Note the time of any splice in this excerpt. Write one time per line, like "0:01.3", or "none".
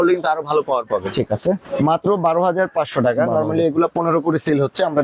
0:01.7